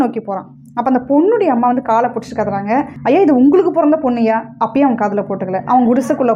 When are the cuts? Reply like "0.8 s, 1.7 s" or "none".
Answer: 2.9 s